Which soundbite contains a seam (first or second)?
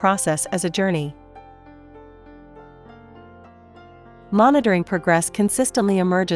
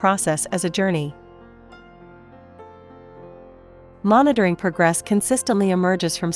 first